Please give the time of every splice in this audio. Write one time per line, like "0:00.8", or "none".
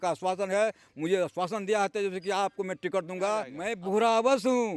0:03.5